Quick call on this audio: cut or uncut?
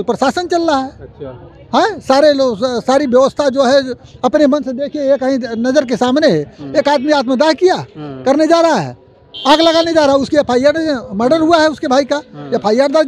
uncut